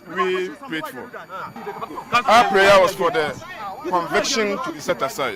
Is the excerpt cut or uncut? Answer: uncut